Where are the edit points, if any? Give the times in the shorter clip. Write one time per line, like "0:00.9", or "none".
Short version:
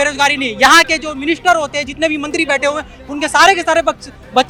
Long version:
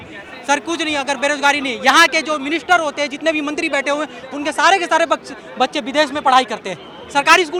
none